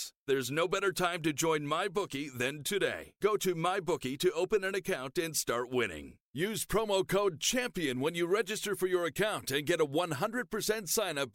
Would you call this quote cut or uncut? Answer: uncut